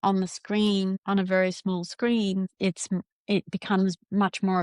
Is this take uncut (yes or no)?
no